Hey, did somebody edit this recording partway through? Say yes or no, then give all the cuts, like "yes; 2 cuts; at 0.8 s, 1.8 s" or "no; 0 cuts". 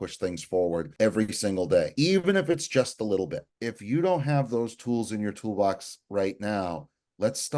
yes; 3 cuts; at 0.9 s, 1.9 s, 3.5 s